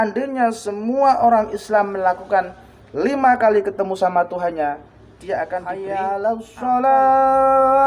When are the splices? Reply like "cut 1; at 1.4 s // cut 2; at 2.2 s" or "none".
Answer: cut 1; at 5.6 s